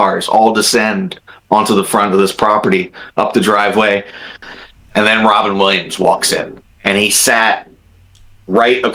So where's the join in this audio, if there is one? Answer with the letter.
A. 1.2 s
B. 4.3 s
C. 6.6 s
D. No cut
B